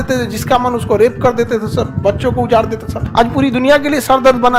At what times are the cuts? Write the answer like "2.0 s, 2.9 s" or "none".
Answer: 3.0 s